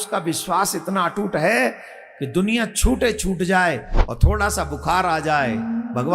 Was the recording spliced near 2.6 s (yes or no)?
no